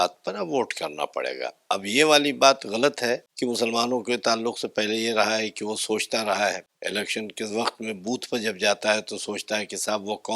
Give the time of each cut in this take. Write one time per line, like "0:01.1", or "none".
0:03.3
0:06.7

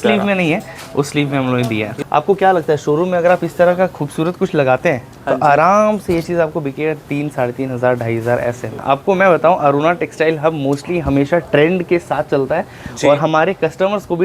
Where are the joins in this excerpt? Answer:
0:01.9
0:08.7

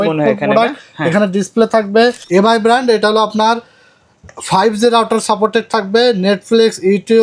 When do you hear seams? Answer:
0:02.2

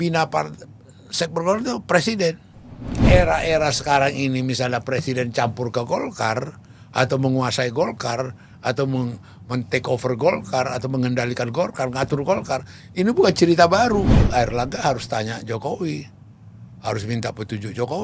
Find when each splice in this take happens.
0:03.0
0:14.2

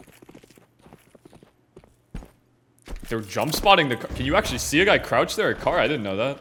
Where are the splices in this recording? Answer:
none

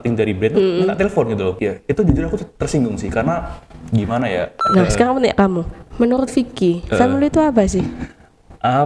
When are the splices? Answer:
0:01.6
0:04.7

